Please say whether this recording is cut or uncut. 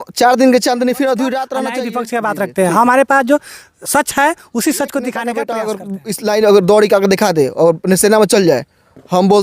cut